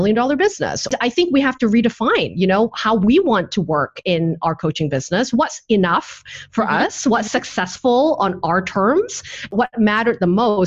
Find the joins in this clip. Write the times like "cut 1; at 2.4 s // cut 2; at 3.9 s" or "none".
cut 1; at 0.9 s // cut 2; at 9.5 s